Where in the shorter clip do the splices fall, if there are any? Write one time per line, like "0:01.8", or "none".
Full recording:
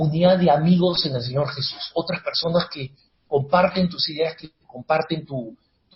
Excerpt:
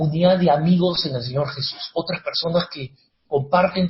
none